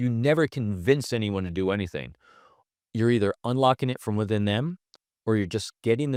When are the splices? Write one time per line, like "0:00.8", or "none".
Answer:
none